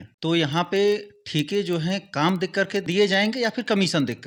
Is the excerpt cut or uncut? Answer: uncut